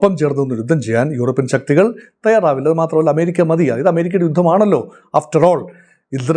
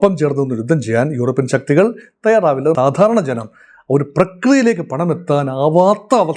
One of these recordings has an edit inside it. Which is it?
second; 1 cut; at 2.7 s

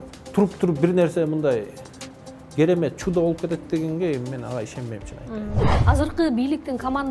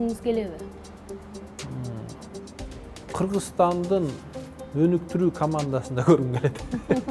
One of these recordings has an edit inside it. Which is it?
first; 1 cut; at 5.8 s

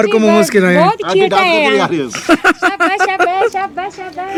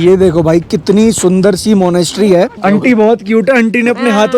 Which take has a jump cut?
second; 1 cut; at 2.5 s

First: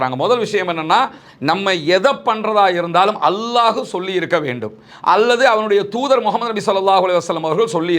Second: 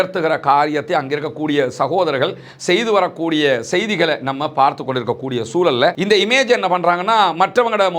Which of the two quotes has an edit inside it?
second; 1 cut; at 6.0 s

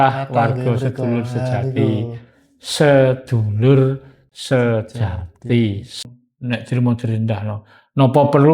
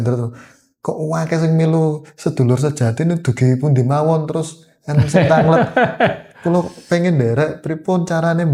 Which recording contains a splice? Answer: first; 1 cut; at 6.0 s

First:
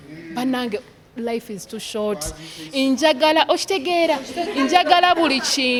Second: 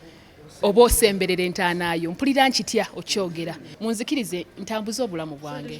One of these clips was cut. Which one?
second; 1 cut; at 3.6 s

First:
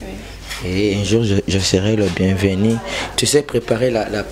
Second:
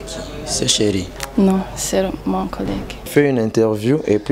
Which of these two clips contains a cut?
second; 1 cut; at 3.0 s

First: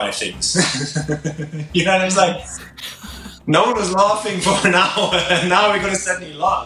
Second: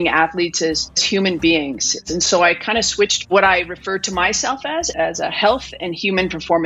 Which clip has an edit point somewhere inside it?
second; 4 cuts; at 1.0 s, 2.0 s, 3.3 s, 4.9 s

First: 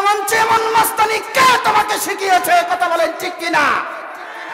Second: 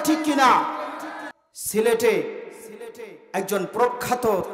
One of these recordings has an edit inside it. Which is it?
second; 1 cut; at 1.6 s

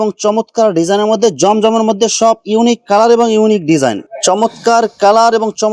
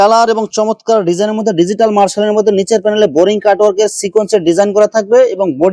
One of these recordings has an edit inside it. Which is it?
first; 1 cut; at 4.1 s

